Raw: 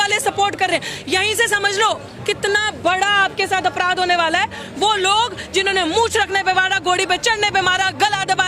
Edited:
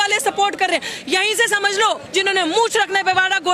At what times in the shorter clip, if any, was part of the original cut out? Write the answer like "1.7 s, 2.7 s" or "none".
2.0 s